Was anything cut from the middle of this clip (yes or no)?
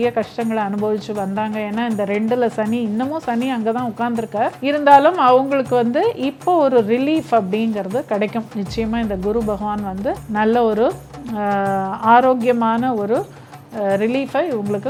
no